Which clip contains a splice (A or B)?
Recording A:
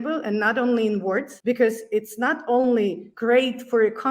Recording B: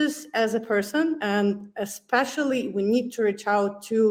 A